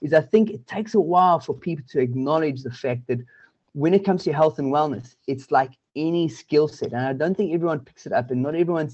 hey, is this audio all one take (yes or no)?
yes